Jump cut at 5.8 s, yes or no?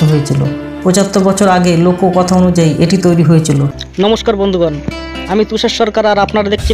no